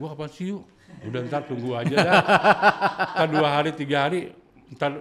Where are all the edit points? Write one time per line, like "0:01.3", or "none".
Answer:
none